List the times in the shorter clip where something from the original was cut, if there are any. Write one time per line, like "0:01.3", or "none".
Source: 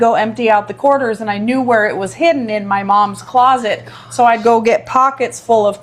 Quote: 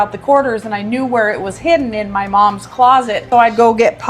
0:03.2